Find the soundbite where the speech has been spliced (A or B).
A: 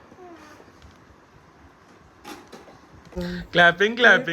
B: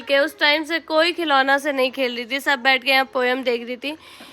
A